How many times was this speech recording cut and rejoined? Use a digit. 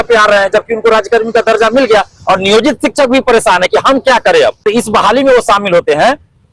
1